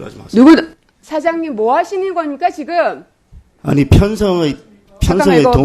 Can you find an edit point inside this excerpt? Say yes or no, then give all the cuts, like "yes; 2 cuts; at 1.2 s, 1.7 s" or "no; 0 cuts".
no; 0 cuts